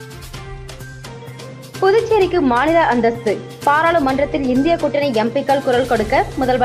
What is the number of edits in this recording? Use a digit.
0